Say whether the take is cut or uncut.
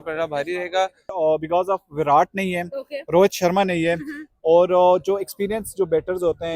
cut